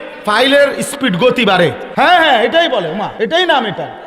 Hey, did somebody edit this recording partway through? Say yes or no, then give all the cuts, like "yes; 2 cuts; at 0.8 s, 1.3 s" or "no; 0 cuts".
yes; 2 cuts; at 1.8 s, 3.1 s